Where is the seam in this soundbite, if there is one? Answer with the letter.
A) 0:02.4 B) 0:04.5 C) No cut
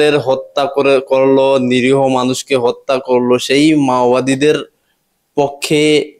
C